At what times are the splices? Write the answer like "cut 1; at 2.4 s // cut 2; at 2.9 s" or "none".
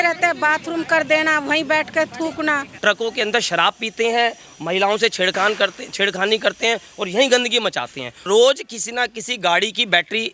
cut 1; at 2.7 s // cut 2; at 8.2 s